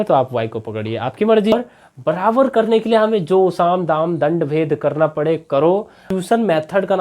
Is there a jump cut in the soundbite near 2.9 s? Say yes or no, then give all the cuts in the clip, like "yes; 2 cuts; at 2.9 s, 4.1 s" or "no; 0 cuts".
no; 2 cuts; at 1.5 s, 6.0 s